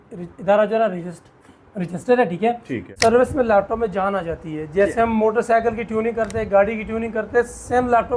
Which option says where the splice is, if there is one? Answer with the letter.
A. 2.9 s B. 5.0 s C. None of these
A